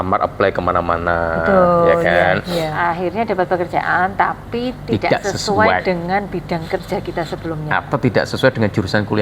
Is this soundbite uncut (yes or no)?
no